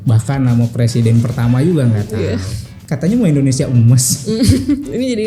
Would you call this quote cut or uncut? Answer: cut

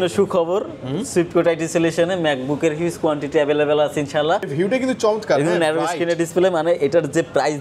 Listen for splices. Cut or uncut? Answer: cut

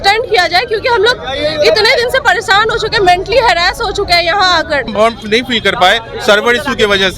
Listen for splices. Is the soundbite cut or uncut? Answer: cut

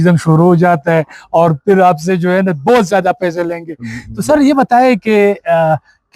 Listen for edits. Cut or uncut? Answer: uncut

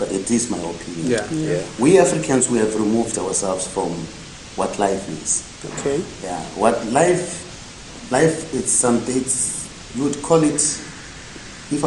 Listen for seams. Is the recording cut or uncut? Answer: uncut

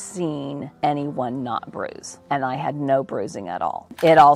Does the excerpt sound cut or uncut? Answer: uncut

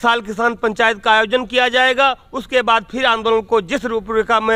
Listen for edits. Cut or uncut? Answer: uncut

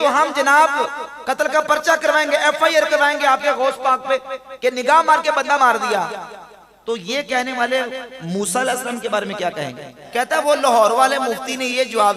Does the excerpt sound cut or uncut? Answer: cut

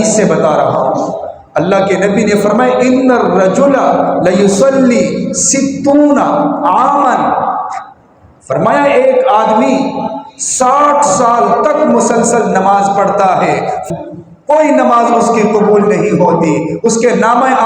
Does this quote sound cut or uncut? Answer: cut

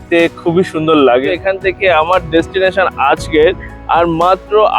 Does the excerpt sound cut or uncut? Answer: cut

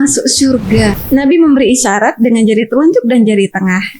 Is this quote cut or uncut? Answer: cut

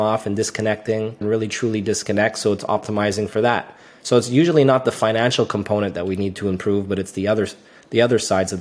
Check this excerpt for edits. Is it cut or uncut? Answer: cut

